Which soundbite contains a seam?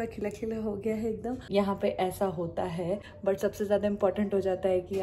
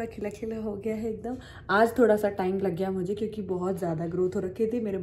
first; 2 cuts; at 1.5 s, 3.1 s

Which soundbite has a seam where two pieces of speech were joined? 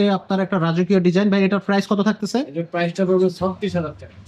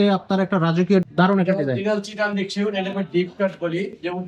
second; 1 cut; at 1.0 s

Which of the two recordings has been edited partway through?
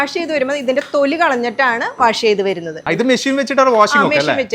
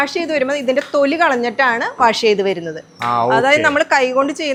first; 1 cut; at 2.8 s

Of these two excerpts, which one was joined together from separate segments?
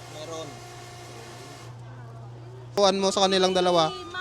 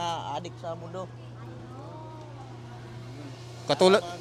first; 1 cut; at 2.8 s

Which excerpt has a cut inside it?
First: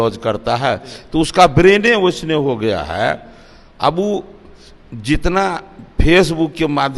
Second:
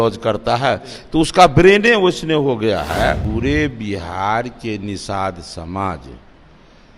second; 1 cut; at 3.2 s

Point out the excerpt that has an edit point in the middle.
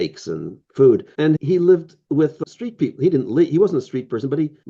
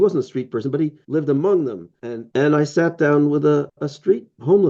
second; 1 cut; at 2.3 s

